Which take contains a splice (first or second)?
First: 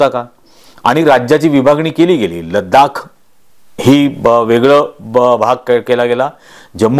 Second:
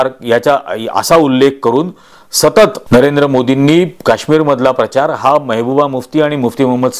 second